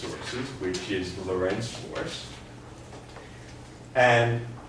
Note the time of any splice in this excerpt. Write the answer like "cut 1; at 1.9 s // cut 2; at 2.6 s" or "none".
none